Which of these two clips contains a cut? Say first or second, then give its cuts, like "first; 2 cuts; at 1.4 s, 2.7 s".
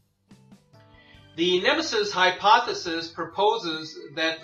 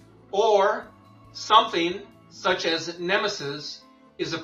first; 1 cut; at 3.2 s